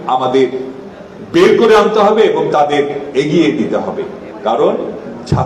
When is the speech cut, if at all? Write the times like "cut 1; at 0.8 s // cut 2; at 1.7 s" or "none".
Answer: none